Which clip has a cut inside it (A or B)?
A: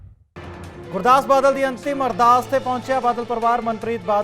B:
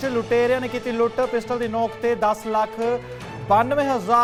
A